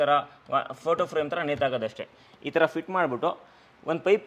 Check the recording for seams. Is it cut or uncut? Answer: uncut